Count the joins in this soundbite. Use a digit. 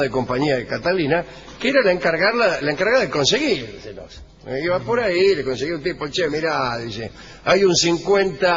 1